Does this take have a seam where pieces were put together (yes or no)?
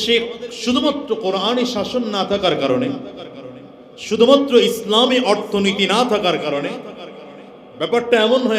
no